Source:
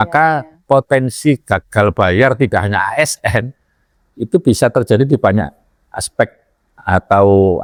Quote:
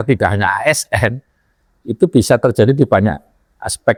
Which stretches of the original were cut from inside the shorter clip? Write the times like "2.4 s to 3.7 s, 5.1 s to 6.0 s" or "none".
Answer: none